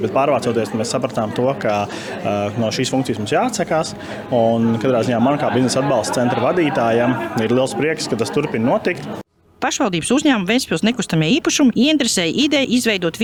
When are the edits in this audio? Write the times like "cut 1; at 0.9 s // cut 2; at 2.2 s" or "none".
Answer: none